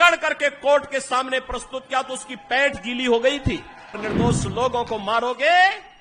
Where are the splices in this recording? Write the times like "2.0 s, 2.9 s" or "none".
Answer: 4.0 s